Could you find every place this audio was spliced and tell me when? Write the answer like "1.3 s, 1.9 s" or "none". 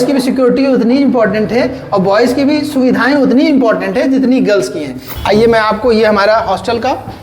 5.0 s